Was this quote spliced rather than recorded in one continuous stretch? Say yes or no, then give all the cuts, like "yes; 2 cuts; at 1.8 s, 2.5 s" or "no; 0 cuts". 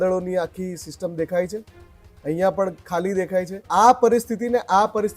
yes; 1 cut; at 3.6 s